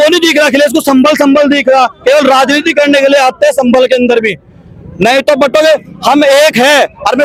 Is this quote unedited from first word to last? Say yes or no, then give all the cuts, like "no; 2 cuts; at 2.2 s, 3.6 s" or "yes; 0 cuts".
yes; 0 cuts